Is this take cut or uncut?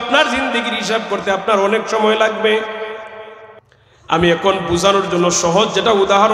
uncut